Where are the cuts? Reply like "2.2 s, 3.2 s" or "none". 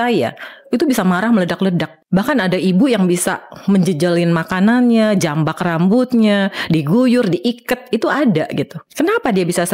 1.9 s, 8.8 s